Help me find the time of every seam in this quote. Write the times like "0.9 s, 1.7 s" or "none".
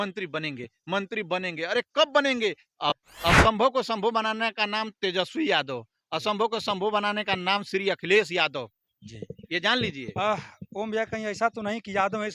3.0 s